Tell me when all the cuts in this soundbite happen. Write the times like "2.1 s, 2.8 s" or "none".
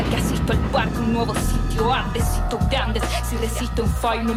none